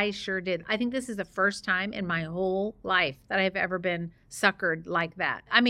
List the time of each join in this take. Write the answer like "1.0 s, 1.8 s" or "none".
none